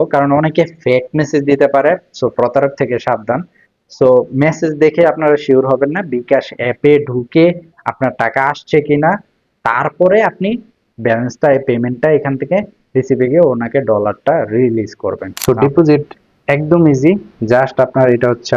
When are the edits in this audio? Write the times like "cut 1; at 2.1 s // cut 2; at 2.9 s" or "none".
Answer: cut 1; at 15.3 s

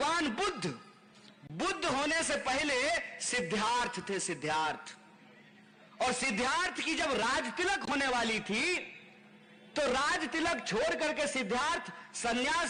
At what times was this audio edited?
none

